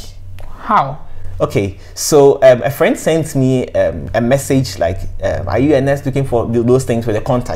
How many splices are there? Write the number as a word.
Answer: zero